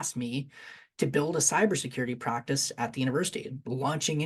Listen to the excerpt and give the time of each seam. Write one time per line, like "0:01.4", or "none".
none